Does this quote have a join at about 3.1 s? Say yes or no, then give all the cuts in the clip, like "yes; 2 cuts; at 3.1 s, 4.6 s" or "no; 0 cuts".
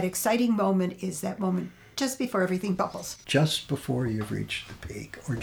yes; 1 cut; at 3.1 s